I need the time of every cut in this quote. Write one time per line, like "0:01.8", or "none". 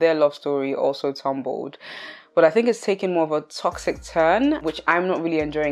none